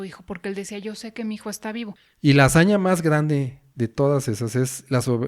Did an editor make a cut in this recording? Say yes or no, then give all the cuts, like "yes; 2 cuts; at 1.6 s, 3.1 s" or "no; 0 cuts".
yes; 1 cut; at 2.0 s